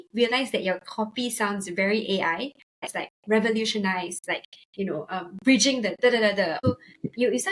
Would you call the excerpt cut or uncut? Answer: cut